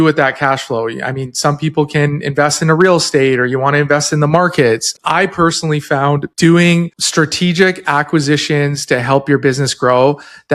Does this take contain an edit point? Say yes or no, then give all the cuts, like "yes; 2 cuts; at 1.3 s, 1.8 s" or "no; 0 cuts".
yes; 3 cuts; at 4.9 s, 6.3 s, 7.0 s